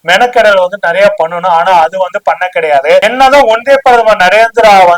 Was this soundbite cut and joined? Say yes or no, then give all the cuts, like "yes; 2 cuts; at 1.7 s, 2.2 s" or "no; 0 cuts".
yes; 1 cut; at 3.0 s